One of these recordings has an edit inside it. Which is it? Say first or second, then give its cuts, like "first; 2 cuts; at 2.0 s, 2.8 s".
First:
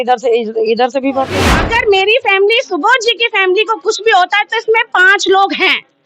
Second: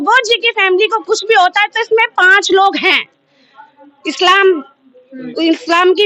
first; 1 cut; at 1.6 s